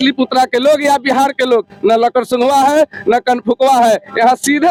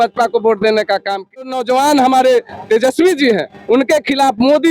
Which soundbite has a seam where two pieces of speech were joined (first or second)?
second